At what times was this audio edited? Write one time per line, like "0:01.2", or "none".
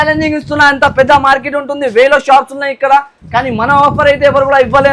none